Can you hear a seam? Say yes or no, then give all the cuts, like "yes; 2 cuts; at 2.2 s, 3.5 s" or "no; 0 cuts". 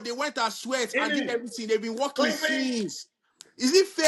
no; 0 cuts